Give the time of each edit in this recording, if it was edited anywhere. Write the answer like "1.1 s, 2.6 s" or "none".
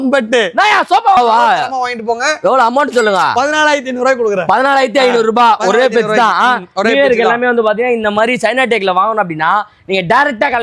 1.2 s